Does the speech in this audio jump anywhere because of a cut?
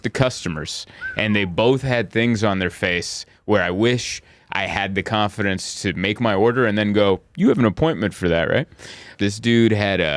yes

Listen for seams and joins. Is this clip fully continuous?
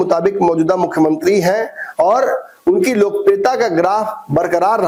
yes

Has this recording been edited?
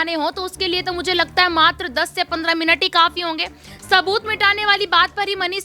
no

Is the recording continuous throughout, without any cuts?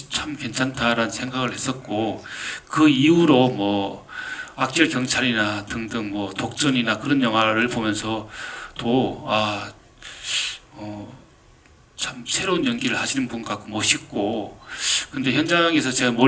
yes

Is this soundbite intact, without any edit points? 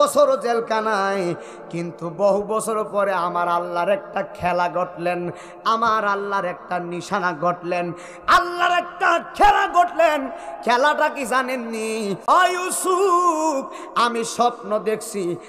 no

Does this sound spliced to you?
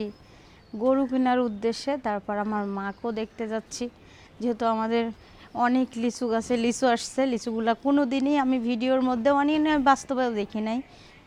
no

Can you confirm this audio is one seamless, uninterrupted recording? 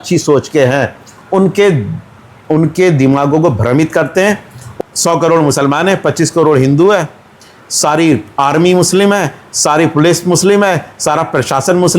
no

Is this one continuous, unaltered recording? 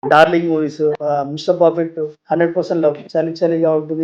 no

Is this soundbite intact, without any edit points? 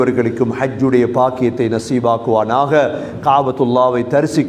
yes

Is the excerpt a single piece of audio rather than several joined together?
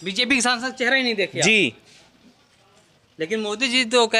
yes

